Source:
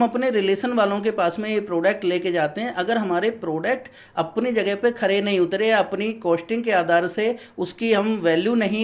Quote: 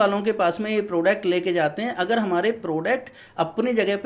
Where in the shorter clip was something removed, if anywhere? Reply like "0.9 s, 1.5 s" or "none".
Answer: none